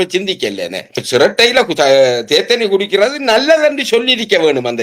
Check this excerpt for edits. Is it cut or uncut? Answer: cut